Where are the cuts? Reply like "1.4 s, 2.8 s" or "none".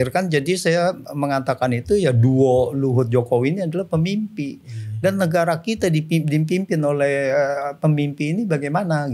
none